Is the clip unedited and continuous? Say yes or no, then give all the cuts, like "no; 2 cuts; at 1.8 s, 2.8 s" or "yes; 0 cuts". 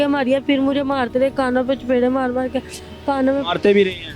yes; 0 cuts